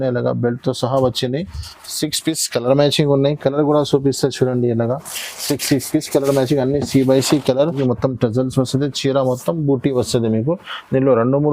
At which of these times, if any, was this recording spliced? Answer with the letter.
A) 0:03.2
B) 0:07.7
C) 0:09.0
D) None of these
B